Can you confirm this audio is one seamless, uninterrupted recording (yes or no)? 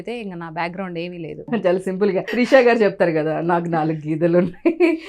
no